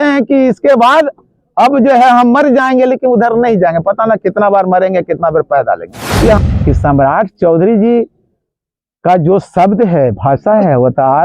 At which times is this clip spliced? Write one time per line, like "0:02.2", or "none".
0:06.4

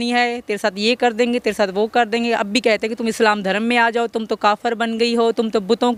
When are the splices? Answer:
none

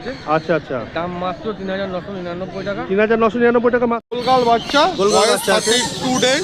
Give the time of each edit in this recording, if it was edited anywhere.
0:04.1

